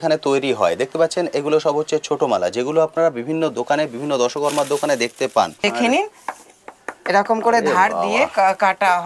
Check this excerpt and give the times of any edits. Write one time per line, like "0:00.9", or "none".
0:05.6